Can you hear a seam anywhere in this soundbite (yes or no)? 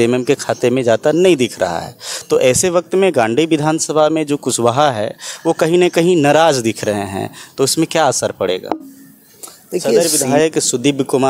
yes